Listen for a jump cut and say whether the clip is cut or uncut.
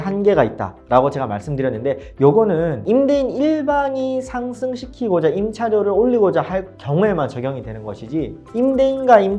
uncut